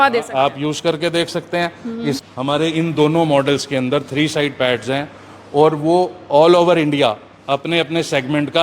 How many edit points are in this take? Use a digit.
1